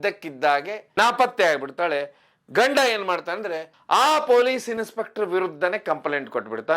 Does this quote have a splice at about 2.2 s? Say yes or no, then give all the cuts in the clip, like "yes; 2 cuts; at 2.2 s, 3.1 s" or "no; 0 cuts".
no; 1 cut; at 3.7 s